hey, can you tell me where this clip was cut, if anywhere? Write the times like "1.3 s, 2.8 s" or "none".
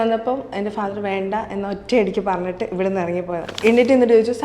3.4 s